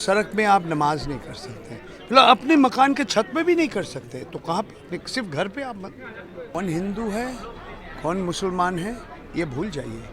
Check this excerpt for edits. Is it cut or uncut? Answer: cut